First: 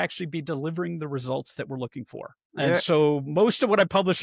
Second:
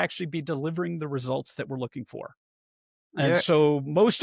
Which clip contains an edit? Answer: first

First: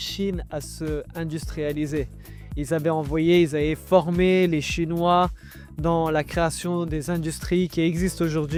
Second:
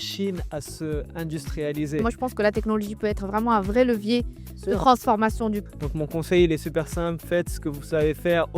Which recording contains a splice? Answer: second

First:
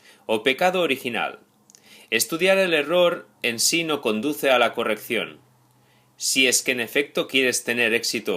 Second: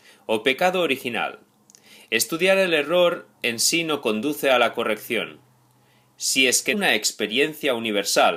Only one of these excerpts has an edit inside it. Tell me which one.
first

